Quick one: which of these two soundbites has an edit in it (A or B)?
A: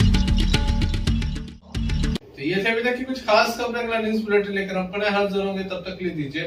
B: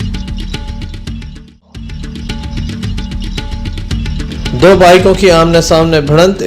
B